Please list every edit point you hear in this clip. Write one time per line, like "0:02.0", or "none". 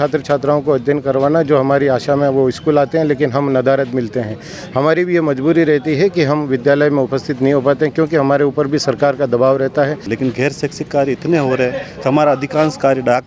0:10.1